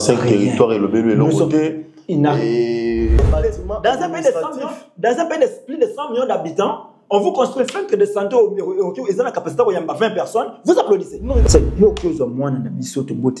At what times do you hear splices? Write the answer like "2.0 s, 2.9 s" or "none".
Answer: 3.3 s, 11.4 s